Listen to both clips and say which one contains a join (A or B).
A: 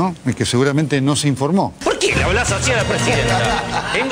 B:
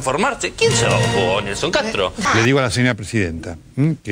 A